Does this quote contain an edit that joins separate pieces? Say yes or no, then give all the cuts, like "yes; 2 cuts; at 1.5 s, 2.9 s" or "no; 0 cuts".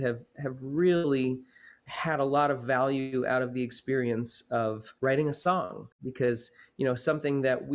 yes; 2 cuts; at 4.9 s, 6.0 s